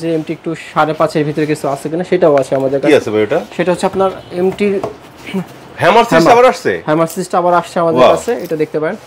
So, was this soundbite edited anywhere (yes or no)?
no